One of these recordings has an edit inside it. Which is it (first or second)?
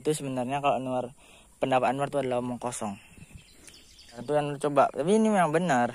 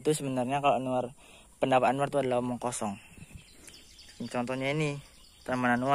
first